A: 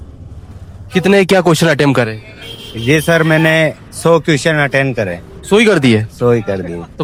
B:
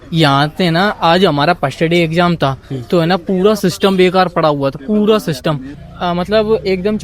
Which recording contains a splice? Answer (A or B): B